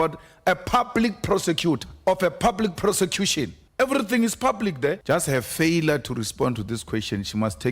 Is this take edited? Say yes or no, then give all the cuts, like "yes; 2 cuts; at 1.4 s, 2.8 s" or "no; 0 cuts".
yes; 3 cuts; at 1.9 s, 3.6 s, 5.0 s